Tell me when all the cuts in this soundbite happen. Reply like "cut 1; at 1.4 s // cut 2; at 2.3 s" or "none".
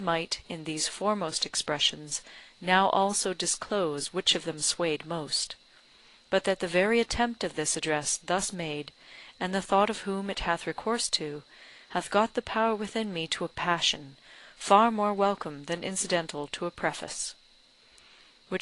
cut 1; at 16.0 s